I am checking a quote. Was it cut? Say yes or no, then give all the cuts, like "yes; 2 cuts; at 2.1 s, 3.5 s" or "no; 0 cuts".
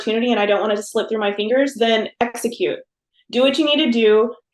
no; 0 cuts